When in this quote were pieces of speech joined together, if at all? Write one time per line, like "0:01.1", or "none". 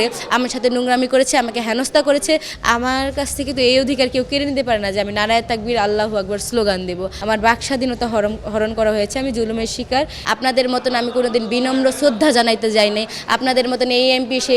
0:02.5
0:07.1
0:10.2